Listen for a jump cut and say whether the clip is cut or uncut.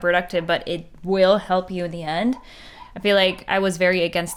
uncut